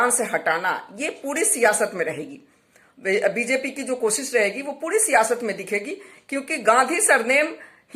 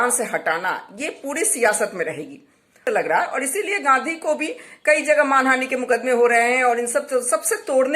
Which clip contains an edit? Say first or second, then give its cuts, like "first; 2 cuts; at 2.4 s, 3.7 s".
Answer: second; 1 cut; at 2.8 s